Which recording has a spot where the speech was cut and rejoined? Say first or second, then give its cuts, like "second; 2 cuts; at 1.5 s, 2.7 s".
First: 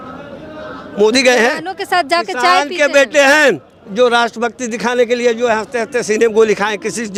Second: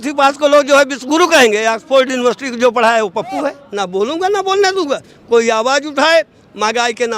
second; 1 cut; at 3.6 s